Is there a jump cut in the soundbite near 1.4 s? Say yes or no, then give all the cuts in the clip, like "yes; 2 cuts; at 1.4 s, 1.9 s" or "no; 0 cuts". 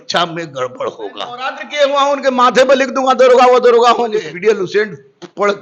yes; 2 cuts; at 1.4 s, 4.2 s